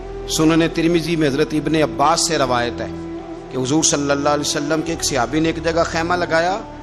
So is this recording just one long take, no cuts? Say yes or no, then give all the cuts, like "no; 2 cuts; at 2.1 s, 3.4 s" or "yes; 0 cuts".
yes; 0 cuts